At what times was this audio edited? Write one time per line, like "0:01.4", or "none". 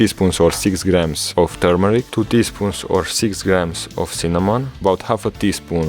0:02.1
0:04.7